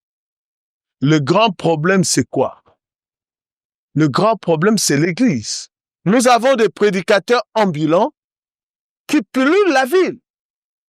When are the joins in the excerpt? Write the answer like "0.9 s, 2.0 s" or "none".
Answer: 5.9 s